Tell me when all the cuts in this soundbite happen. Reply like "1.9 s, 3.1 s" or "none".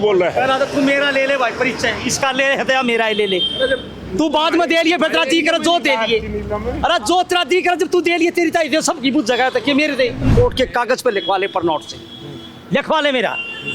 10.3 s